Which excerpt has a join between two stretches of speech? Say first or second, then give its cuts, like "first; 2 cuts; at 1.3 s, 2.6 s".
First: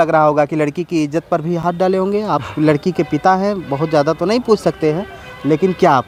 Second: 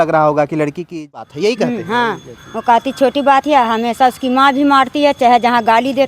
second; 1 cut; at 1.2 s